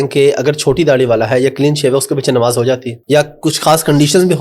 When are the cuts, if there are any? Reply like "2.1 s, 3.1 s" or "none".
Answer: 2.9 s